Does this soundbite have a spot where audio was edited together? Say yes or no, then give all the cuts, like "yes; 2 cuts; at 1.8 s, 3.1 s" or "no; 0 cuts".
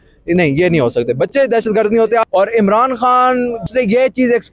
yes; 2 cuts; at 2.3 s, 3.6 s